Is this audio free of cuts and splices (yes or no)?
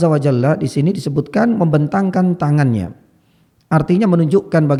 yes